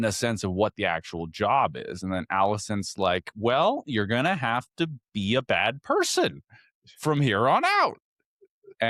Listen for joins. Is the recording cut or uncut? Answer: uncut